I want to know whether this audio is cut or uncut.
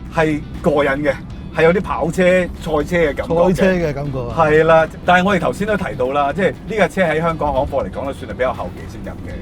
uncut